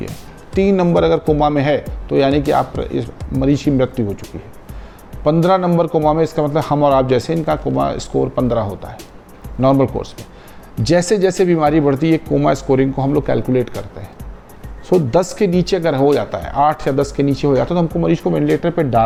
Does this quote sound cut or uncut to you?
uncut